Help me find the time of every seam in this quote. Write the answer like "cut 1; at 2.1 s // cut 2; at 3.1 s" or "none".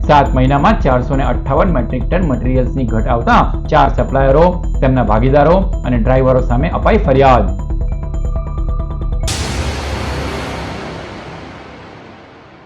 cut 1; at 9.4 s

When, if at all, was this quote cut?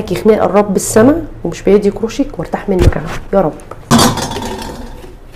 cut 1; at 3.9 s

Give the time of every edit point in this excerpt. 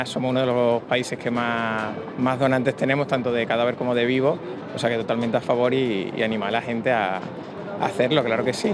none

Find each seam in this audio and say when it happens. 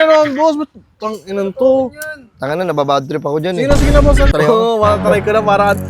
cut 1; at 4.3 s

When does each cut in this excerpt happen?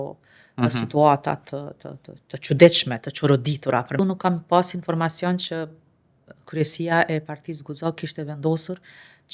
cut 1; at 4.0 s

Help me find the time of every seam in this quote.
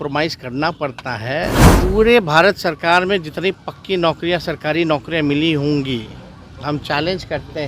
cut 1; at 1.7 s

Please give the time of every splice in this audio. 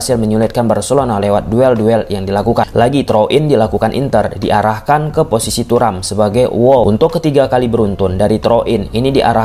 cut 1; at 2.7 s // cut 2; at 6.8 s

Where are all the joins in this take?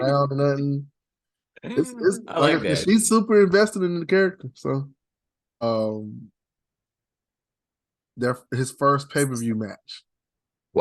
cut 1; at 5.6 s

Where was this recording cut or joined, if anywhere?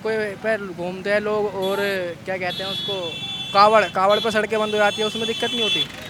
none

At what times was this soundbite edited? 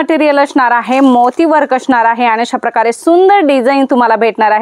none

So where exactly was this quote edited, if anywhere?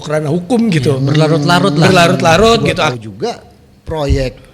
cut 1; at 2.9 s

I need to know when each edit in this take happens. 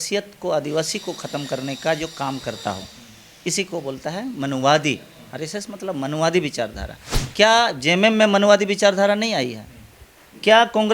none

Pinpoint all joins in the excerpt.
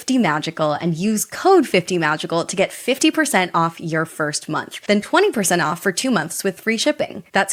none

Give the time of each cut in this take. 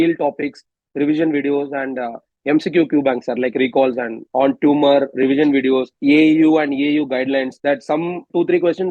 cut 1; at 4.2 s // cut 2; at 5.9 s // cut 3; at 8.0 s

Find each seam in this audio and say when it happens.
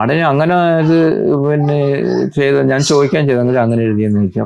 none

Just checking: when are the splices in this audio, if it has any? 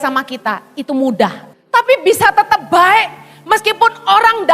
cut 1; at 1.5 s

